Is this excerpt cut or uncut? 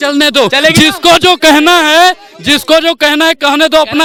uncut